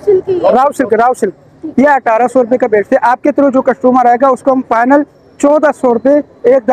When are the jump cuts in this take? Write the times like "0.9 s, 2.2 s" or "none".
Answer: none